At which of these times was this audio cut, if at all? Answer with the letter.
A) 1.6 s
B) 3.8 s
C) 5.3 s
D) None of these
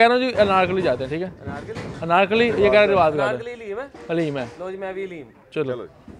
D